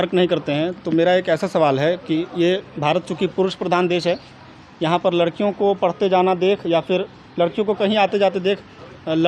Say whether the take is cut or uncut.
uncut